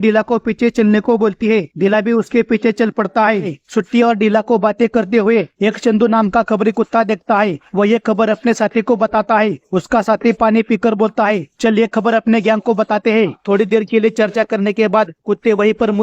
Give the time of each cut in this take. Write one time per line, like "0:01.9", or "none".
0:03.6
0:13.4

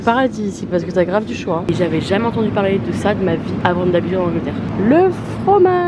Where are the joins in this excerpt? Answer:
0:01.7
0:03.6
0:04.7

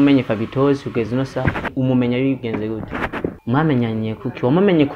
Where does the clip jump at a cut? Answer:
0:01.7
0:03.4

